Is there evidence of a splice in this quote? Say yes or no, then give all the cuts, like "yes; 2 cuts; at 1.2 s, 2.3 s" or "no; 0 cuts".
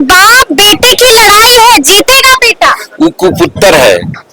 no; 0 cuts